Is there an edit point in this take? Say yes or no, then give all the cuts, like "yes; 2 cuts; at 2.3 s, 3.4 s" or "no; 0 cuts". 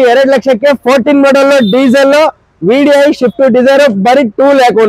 no; 0 cuts